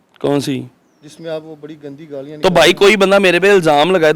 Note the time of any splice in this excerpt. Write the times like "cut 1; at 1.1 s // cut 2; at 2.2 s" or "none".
none